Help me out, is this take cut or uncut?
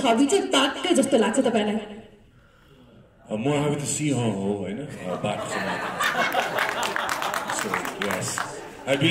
uncut